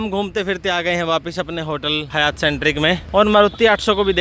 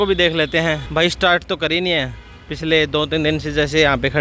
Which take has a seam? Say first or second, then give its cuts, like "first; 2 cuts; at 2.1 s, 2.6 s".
first; 2 cuts; at 2.1 s, 3.0 s